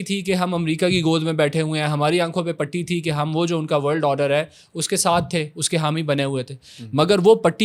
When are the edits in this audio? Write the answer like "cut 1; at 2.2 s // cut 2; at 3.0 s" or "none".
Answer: none